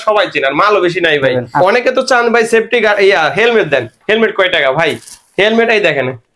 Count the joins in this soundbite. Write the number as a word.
one